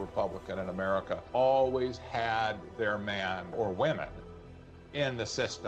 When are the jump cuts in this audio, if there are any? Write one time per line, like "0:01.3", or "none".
0:01.2
0:03.5